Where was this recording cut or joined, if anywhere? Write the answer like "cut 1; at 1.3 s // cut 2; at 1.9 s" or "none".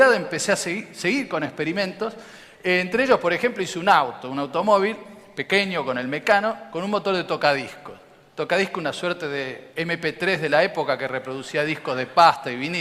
cut 1; at 7.6 s